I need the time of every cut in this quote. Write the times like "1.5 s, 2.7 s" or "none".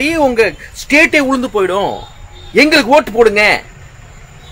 none